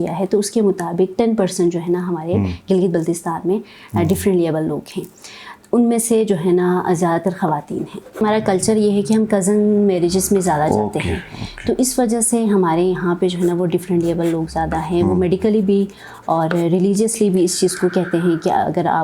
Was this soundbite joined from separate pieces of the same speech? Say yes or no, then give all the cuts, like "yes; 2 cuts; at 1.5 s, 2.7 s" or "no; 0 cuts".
yes; 1 cut; at 8.2 s